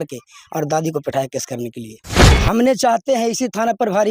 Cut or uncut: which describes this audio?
cut